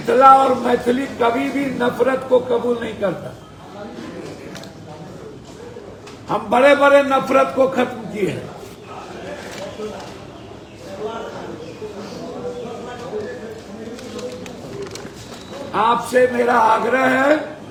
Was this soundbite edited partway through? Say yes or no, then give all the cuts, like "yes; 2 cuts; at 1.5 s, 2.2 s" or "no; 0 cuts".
no; 0 cuts